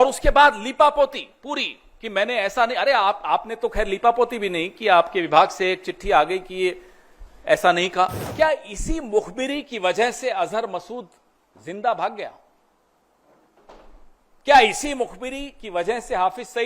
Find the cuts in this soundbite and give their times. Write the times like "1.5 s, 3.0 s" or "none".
8.2 s